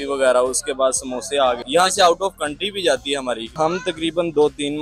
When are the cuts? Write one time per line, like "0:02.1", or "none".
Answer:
0:01.6
0:03.5